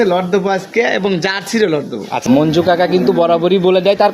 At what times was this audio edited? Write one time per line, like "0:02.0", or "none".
0:02.2